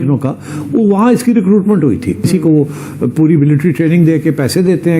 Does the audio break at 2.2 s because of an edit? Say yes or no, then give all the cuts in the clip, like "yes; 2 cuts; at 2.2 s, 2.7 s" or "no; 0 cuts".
yes; 1 cut; at 2.2 s